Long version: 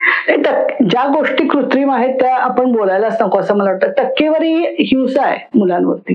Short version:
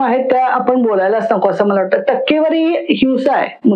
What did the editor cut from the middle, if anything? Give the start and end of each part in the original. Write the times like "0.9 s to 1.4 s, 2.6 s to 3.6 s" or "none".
none